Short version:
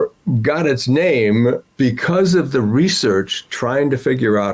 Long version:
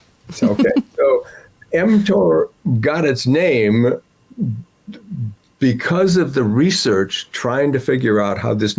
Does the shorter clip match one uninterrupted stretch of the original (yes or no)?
no